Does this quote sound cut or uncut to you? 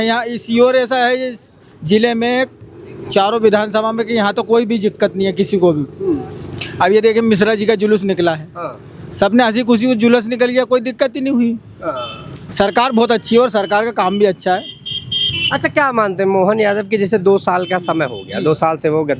uncut